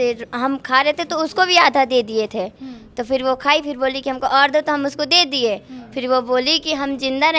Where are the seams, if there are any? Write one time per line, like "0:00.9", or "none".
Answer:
none